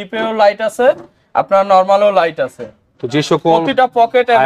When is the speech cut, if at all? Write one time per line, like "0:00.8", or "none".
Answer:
none